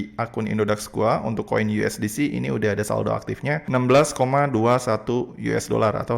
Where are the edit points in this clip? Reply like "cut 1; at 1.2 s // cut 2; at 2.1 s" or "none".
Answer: none